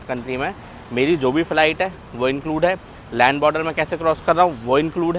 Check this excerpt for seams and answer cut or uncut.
uncut